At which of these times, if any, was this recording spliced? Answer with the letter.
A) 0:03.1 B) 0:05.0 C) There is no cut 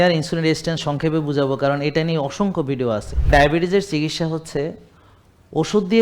A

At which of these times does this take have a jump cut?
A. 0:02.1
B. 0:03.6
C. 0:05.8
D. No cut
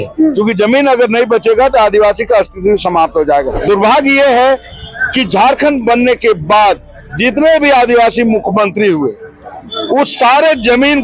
B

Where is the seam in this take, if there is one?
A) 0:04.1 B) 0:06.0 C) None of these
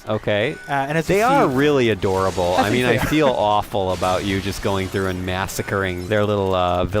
B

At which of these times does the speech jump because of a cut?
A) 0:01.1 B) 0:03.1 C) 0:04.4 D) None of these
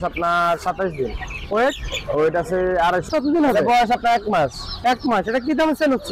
B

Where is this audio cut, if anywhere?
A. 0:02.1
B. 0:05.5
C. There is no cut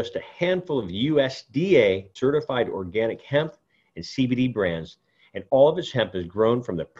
A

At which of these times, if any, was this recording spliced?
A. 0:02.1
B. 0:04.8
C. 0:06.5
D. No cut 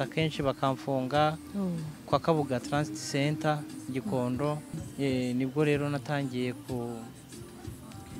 B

